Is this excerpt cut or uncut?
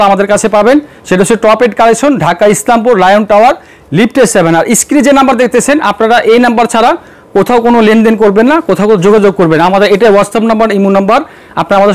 uncut